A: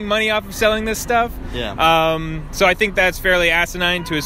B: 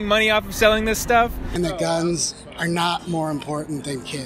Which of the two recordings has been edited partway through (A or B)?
B